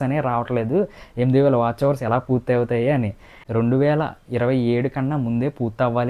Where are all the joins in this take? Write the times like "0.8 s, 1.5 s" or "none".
3.3 s